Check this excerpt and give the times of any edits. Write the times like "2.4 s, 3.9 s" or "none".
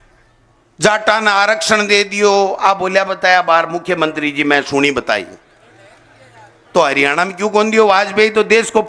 none